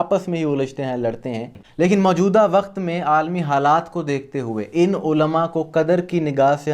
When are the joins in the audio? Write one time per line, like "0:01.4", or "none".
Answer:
0:01.6